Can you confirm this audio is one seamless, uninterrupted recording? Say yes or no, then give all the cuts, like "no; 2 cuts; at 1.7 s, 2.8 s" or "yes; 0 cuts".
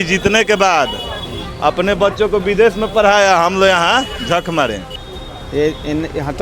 no; 1 cut; at 5.0 s